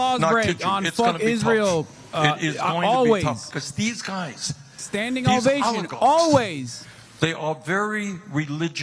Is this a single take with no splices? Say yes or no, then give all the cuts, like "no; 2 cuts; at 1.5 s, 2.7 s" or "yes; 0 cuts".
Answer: yes; 0 cuts